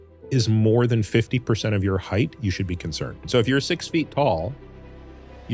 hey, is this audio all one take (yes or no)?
no